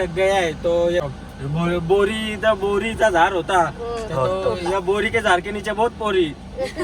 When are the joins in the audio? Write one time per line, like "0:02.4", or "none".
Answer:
0:01.1